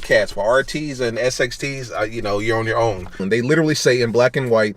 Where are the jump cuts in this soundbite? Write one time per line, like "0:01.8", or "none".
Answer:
0:03.2